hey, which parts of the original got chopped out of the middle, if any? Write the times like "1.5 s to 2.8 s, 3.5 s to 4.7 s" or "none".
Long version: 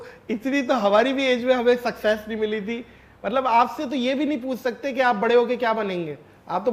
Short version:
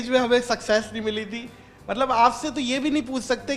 none